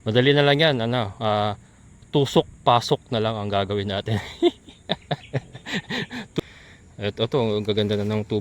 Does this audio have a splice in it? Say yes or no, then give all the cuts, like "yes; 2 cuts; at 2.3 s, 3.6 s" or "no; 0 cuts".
yes; 1 cut; at 6.4 s